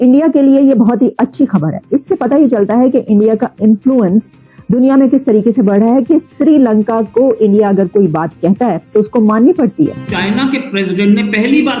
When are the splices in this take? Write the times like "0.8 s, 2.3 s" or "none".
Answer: 10.1 s